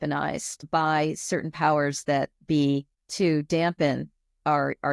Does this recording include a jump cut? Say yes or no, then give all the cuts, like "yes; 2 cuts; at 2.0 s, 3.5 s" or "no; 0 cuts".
yes; 1 cut; at 3.0 s